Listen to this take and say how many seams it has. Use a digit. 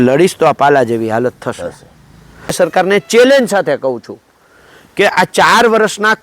1